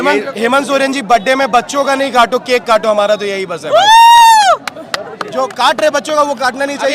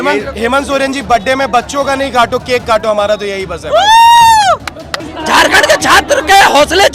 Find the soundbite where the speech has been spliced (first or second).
second